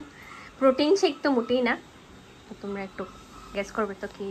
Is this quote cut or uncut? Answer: uncut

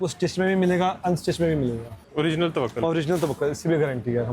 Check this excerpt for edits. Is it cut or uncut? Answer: cut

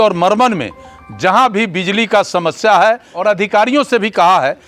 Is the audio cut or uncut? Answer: cut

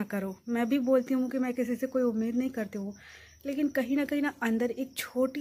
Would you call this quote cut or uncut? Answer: uncut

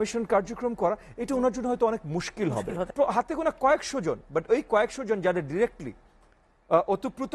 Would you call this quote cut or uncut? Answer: cut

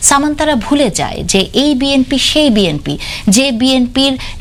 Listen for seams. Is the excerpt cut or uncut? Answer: uncut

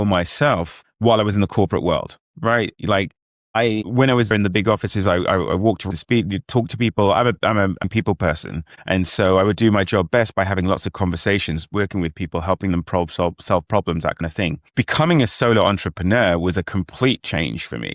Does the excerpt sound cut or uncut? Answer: uncut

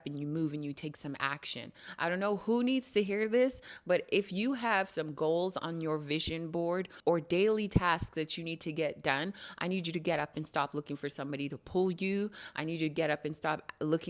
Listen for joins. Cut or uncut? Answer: cut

